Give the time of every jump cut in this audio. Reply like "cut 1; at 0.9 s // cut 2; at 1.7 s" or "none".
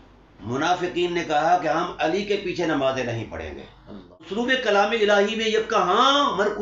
cut 1; at 4.4 s